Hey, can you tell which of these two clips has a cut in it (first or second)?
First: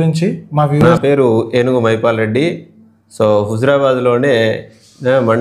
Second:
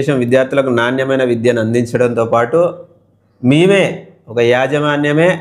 first